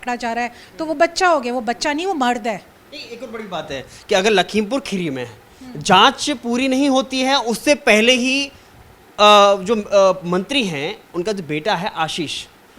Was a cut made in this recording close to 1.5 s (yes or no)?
no